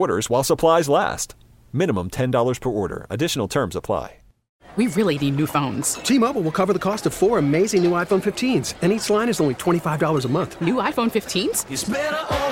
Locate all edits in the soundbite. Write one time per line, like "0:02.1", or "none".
0:04.6